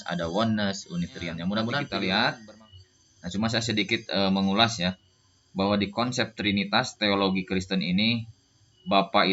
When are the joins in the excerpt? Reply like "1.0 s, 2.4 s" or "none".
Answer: 1.8 s